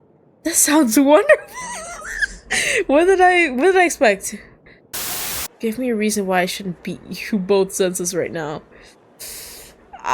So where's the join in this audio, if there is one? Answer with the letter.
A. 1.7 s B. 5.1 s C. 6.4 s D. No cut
B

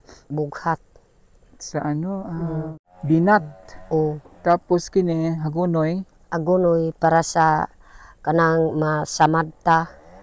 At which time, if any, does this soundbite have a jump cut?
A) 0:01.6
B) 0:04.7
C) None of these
C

